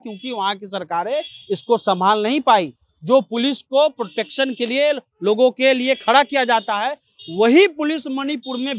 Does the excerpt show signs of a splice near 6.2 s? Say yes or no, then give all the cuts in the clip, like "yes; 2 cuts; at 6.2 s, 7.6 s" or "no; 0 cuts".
no; 0 cuts